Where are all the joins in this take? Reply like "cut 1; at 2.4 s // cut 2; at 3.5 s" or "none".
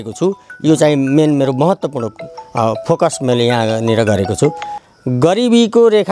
cut 1; at 4.7 s